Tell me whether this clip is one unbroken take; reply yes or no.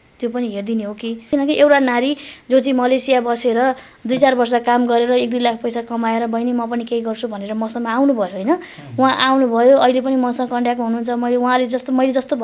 no